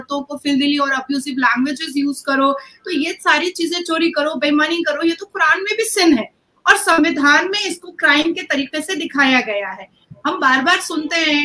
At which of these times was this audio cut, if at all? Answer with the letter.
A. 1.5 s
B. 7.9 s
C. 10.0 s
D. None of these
D